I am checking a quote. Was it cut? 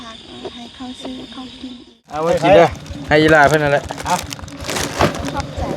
yes; 1 cut; at 2.2 s

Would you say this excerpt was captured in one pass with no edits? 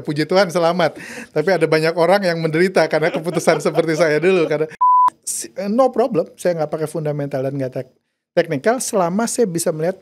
no; 1 cut; at 5.0 s

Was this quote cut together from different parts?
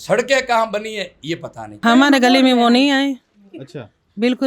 yes; 1 cut; at 1.8 s

